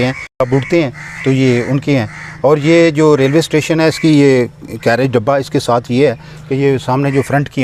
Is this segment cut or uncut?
uncut